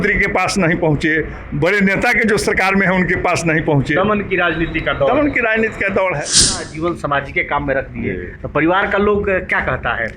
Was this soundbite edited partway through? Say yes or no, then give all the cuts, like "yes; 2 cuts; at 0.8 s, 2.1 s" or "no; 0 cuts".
yes; 1 cut; at 6.5 s